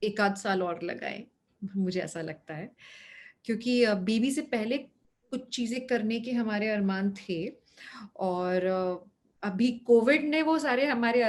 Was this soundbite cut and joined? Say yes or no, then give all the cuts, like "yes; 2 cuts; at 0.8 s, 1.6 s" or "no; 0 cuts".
no; 0 cuts